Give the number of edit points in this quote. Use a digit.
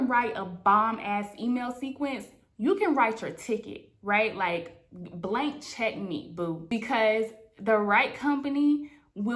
0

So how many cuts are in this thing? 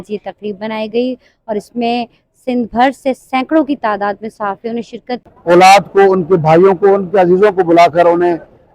1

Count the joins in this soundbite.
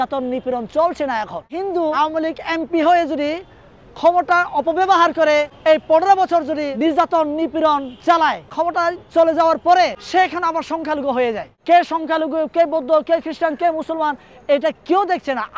6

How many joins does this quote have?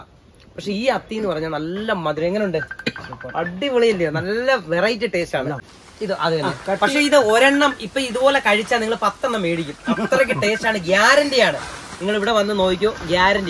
1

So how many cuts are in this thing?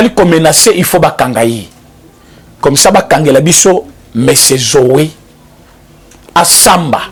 0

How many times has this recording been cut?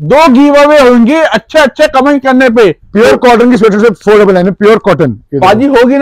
0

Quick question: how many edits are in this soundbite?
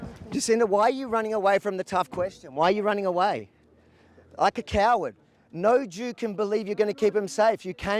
0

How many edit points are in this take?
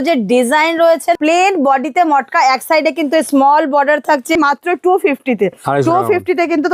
2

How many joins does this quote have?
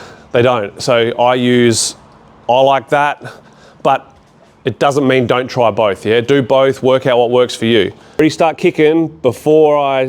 1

